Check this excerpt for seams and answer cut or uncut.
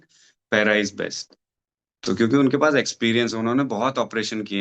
uncut